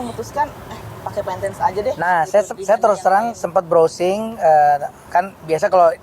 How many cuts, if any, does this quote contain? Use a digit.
1